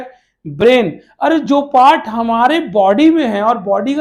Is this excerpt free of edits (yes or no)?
yes